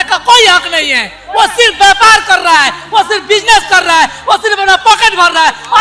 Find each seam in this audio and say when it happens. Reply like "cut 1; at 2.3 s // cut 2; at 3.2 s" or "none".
none